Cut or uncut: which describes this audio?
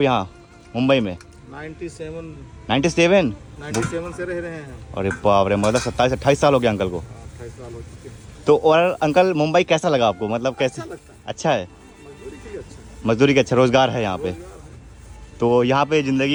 uncut